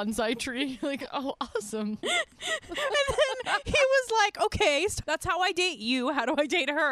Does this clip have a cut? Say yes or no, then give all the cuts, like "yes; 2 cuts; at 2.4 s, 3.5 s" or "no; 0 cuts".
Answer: yes; 1 cut; at 5.0 s